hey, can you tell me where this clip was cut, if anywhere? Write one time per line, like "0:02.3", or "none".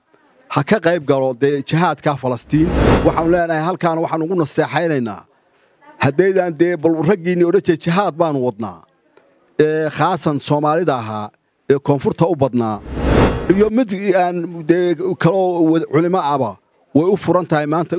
0:02.9